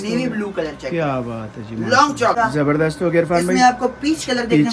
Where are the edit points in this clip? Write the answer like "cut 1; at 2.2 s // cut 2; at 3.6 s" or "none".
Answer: cut 1; at 2.3 s